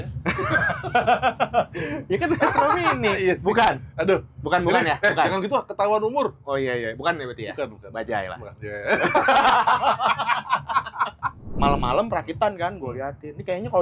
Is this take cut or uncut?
cut